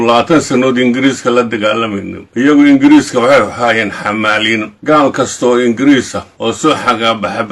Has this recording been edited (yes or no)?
yes